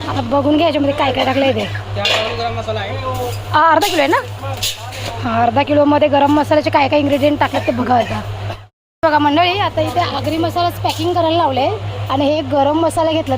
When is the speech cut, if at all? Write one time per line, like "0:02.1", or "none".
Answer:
0:09.0